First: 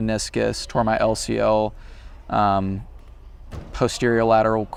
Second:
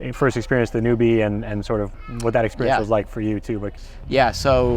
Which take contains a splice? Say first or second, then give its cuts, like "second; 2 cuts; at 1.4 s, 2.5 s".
second; 2 cuts; at 1.9 s, 3.8 s